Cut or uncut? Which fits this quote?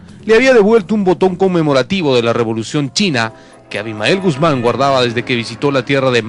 cut